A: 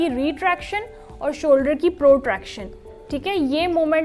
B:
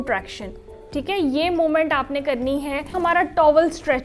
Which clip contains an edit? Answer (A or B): B